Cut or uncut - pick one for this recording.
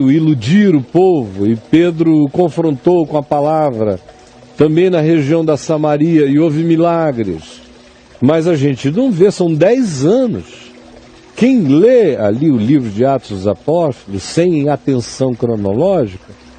uncut